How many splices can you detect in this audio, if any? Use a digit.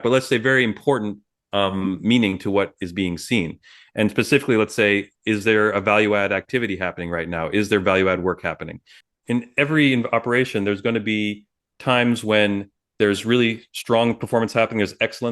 1